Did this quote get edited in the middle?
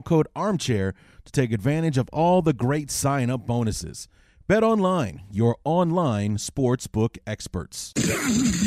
yes; 1 cut; at 7.8 s

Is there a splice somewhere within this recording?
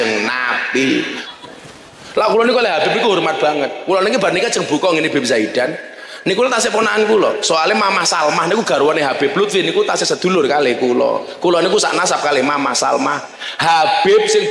yes; 1 cut; at 1.2 s

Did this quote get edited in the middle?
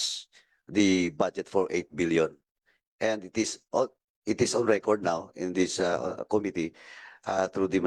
no; 0 cuts

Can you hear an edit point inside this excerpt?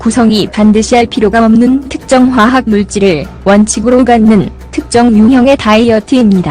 yes; 1 cut; at 1.4 s

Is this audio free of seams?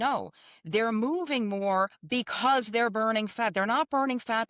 yes; 0 cuts

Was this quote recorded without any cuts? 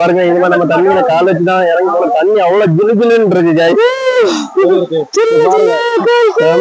yes; 0 cuts

